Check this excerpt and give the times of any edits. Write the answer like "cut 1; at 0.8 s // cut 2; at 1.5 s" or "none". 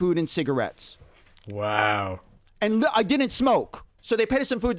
none